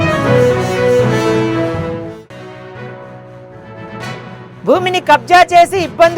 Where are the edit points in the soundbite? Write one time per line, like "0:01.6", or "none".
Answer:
0:02.1
0:04.0